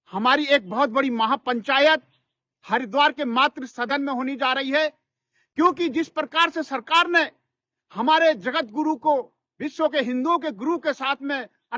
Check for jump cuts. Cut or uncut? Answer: uncut